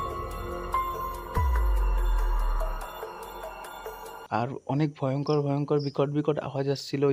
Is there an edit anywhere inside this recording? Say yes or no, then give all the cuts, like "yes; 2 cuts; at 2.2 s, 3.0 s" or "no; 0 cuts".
no; 0 cuts